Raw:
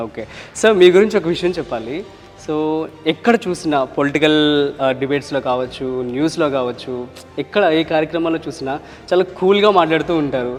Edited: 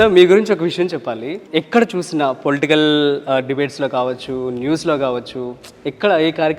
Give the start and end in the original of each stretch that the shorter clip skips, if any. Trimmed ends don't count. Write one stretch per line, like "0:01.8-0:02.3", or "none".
0:02.1-0:02.9